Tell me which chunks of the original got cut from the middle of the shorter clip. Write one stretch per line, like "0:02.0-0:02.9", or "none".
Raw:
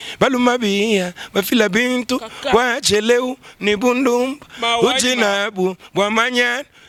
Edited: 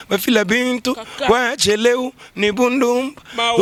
none